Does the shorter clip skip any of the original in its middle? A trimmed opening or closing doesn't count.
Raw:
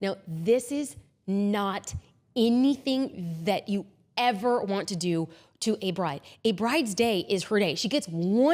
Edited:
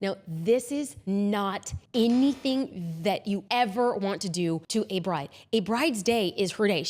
yes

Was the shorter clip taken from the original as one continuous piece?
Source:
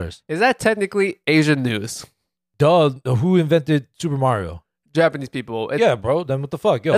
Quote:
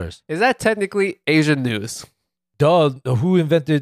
yes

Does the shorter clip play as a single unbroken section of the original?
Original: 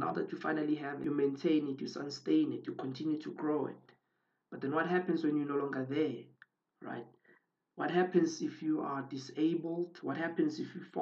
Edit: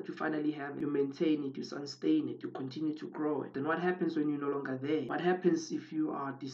no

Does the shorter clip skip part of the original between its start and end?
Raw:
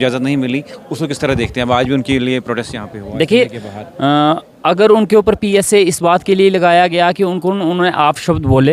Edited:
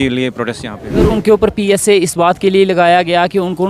yes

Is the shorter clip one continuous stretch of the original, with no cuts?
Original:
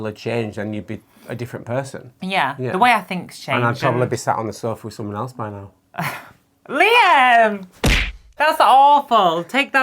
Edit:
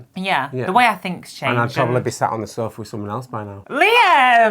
no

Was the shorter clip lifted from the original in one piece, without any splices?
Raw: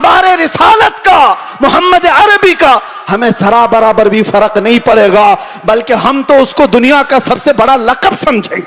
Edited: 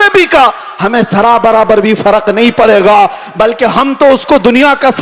yes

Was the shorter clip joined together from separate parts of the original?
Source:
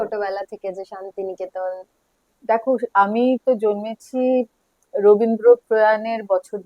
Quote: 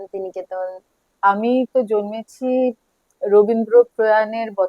yes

